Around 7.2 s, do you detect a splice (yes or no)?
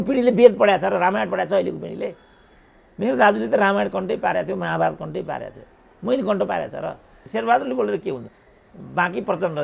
yes